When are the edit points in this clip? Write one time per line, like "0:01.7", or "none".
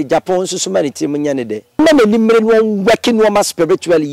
0:01.8